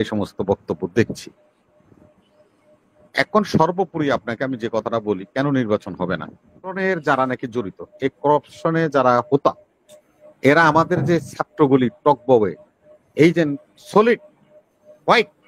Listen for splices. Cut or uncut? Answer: cut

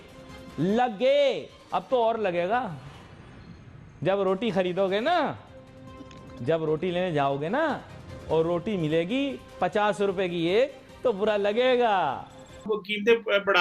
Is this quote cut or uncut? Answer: cut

